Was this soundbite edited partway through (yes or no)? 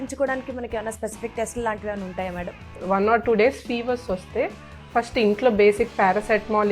yes